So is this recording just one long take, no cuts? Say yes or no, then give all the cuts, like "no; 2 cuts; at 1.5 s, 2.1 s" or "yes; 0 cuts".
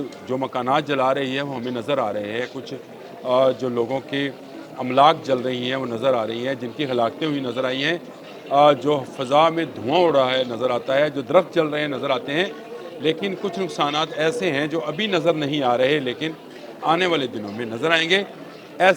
yes; 0 cuts